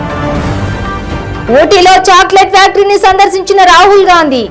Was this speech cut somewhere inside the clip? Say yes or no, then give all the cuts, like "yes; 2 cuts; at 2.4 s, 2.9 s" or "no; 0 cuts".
yes; 1 cut; at 1.2 s